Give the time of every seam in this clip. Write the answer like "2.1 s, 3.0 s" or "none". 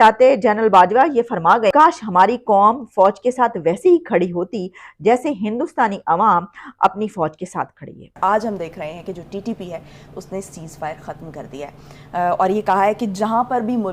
1.7 s, 8.0 s